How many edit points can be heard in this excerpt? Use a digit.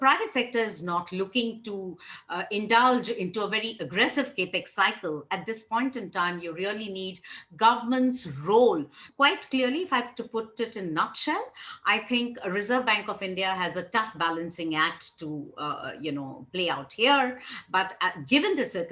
1